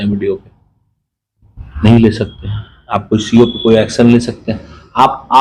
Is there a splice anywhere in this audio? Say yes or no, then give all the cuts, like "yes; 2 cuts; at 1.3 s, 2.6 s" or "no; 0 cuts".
no; 0 cuts